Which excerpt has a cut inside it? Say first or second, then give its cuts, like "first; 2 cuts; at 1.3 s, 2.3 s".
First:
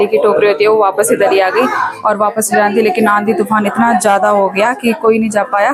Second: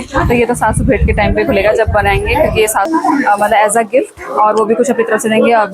second; 1 cut; at 2.9 s